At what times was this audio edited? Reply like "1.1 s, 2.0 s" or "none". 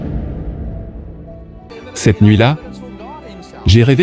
1.7 s

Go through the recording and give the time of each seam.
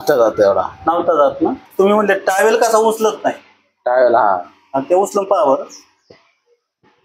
1.6 s

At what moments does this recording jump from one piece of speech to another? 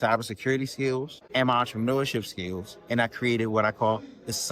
1.2 s

